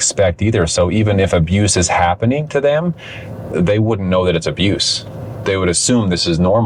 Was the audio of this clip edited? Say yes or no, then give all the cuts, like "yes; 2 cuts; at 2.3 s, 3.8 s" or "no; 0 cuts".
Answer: no; 0 cuts